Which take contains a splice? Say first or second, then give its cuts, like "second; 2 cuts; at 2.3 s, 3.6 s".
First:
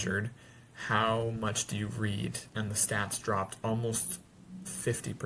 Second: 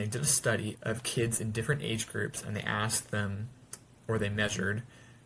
first; 1 cut; at 2.4 s